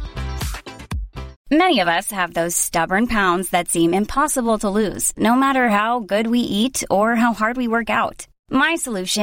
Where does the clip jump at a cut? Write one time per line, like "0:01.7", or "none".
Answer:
0:01.3